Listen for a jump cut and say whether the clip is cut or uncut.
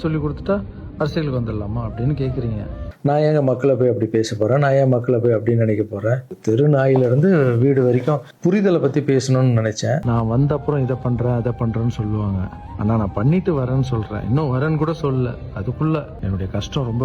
cut